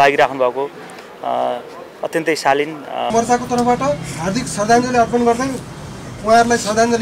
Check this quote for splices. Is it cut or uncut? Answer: cut